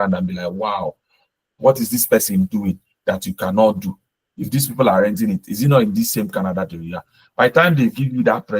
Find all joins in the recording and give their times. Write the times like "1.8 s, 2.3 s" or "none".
none